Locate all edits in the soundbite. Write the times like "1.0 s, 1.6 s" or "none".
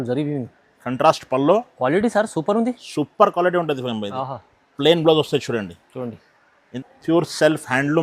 6.7 s